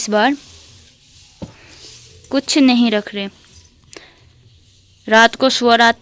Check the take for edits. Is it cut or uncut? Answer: uncut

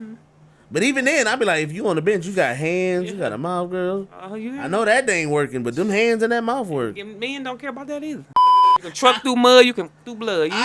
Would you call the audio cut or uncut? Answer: cut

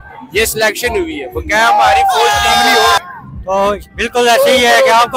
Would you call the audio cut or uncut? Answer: cut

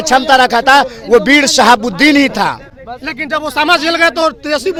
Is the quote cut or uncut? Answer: uncut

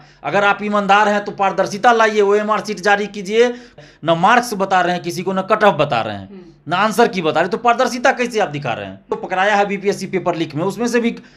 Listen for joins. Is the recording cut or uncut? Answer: cut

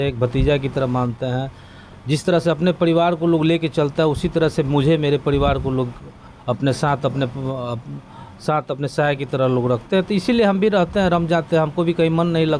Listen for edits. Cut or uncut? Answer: uncut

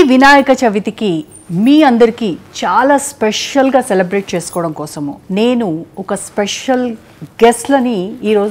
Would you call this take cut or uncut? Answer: uncut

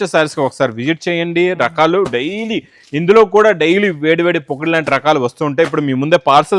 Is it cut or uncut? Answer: uncut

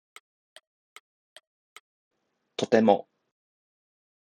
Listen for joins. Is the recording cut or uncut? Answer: cut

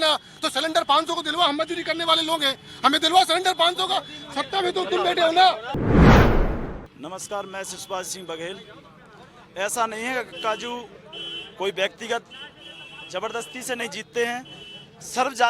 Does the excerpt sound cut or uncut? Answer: uncut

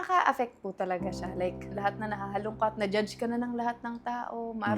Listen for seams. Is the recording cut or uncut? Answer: cut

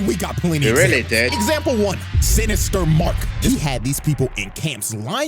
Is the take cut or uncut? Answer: cut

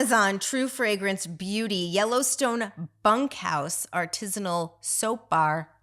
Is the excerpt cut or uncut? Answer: uncut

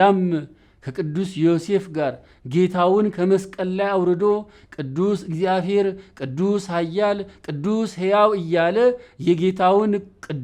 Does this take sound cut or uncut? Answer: uncut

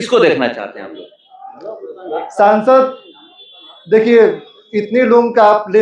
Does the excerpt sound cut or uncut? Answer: uncut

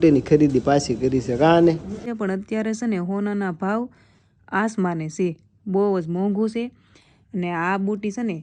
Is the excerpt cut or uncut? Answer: cut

